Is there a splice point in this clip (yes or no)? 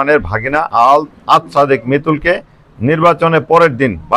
no